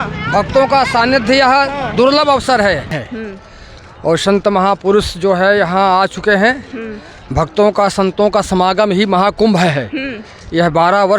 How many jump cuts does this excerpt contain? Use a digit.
1